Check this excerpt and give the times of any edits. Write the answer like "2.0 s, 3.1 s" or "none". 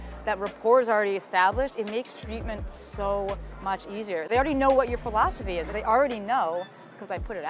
5.7 s